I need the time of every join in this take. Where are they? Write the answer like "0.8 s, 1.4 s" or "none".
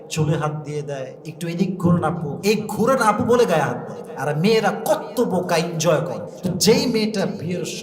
1.2 s, 2.3 s, 6.3 s